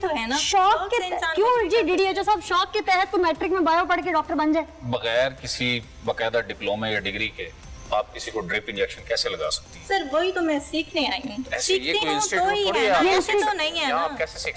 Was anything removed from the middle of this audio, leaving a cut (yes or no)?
no